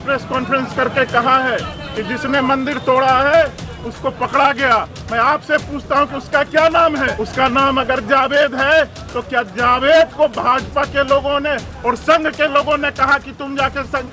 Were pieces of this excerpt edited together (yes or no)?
yes